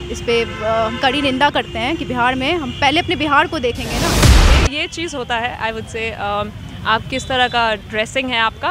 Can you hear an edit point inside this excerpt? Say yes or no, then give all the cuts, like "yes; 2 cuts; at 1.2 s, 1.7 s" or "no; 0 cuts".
yes; 1 cut; at 4.3 s